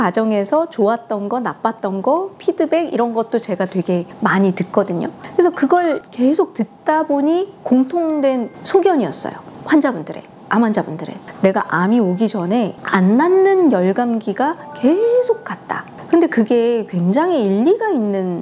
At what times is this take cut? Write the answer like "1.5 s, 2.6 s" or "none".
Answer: none